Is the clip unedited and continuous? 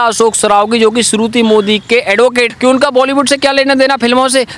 no; 1 cut; at 2.5 s

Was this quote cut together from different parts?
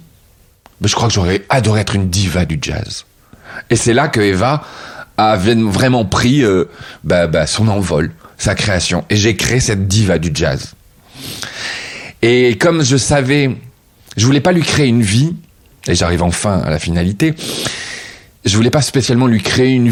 no; 0 cuts

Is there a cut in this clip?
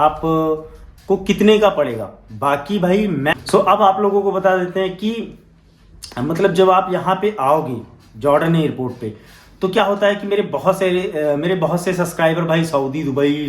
yes; 1 cut; at 3.3 s

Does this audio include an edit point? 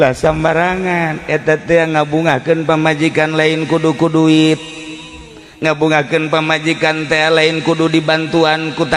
no; 0 cuts

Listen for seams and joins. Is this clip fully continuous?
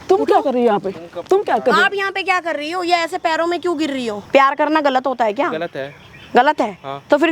no; 1 cut; at 4.1 s

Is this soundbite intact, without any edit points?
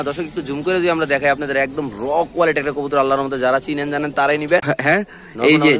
no; 1 cut; at 4.7 s

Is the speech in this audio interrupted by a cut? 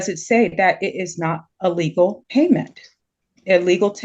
yes; 1 cut; at 2.2 s

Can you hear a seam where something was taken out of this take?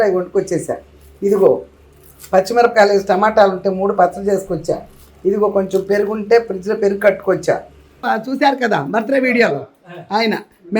yes; 1 cut; at 8.0 s

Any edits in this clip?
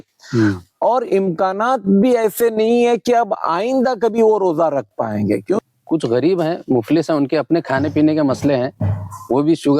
yes; 1 cut; at 5.6 s

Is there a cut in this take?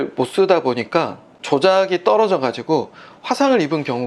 no; 0 cuts

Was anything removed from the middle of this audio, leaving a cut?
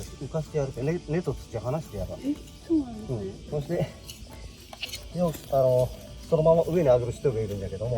no; 0 cuts

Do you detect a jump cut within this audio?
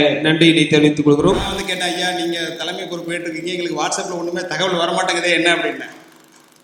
yes; 1 cut; at 1.4 s

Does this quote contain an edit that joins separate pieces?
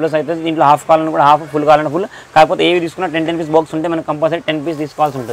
no; 0 cuts

